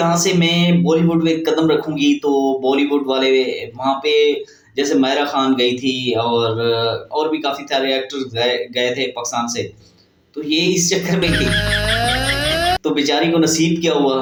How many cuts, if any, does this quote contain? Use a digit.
0